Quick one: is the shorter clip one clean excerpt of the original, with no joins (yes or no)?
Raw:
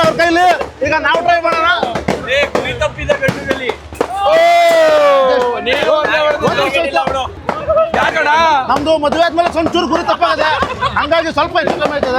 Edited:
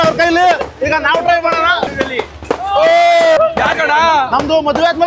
no